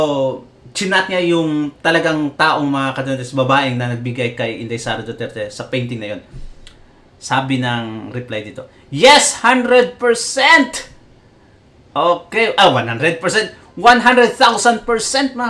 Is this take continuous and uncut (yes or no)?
yes